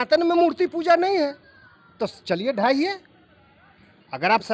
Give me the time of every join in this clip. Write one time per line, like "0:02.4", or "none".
none